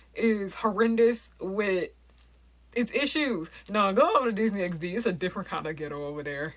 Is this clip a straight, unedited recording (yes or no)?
yes